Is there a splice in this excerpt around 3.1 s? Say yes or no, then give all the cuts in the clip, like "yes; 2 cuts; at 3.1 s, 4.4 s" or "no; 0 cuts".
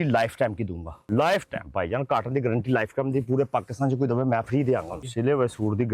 no; 2 cuts; at 1.0 s, 5.0 s